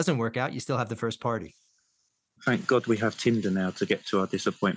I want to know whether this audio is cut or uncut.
uncut